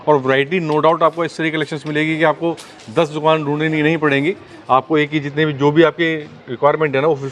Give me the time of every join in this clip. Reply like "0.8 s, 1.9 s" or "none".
none